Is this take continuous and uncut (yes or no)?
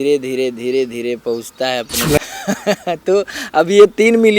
no